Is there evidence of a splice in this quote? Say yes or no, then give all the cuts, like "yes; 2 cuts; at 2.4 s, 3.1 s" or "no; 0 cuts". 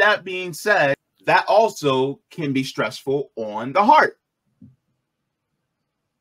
yes; 1 cut; at 1.1 s